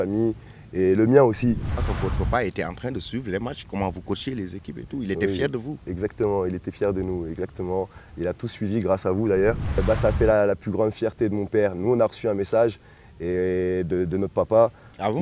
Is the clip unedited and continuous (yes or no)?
no